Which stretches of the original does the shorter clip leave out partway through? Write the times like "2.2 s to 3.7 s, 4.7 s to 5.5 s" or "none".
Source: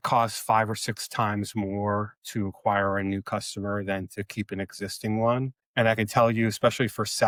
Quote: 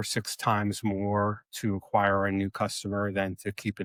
none